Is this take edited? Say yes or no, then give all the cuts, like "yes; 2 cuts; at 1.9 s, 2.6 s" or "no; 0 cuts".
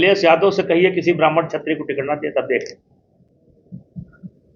no; 0 cuts